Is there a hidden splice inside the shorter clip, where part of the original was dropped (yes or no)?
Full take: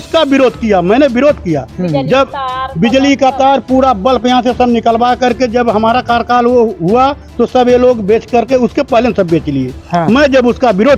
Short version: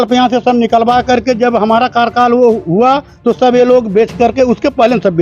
no